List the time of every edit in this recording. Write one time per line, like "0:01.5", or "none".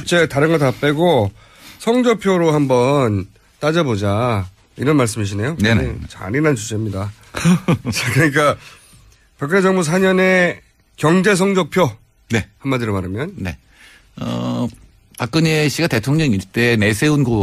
0:12.6